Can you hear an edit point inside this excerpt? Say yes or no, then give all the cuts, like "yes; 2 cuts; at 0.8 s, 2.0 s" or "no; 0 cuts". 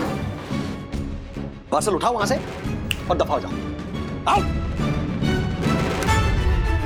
no; 0 cuts